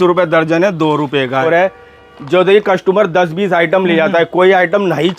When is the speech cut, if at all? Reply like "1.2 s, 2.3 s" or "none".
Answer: 1.5 s